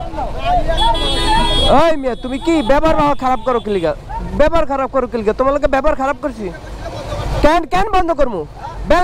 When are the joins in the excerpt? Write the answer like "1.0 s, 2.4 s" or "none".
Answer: none